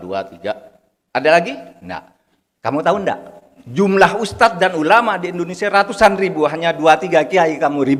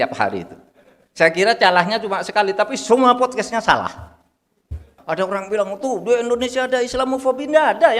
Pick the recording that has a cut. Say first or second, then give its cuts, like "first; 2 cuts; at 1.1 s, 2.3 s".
second; 1 cut; at 4.9 s